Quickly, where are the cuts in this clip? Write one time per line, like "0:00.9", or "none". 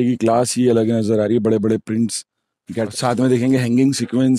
0:02.9